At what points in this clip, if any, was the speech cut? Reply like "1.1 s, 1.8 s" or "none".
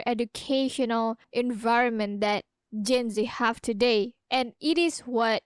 1.2 s